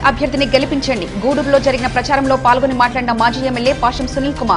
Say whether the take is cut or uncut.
uncut